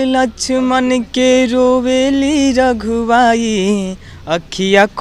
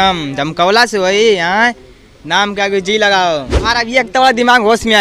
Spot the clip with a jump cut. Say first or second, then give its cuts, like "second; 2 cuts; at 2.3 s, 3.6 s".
second; 1 cut; at 3.5 s